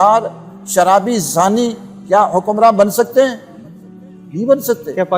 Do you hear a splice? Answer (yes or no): no